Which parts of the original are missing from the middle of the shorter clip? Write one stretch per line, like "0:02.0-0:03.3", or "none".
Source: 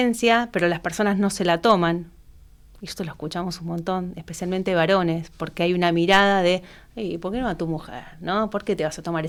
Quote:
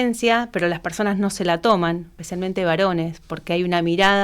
0:02.2-0:04.3